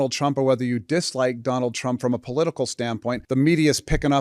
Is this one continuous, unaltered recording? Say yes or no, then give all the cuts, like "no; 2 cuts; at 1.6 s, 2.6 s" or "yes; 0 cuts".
no; 1 cut; at 3.2 s